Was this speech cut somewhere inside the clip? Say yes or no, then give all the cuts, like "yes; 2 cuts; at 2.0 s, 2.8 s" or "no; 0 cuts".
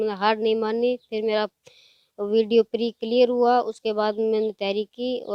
no; 0 cuts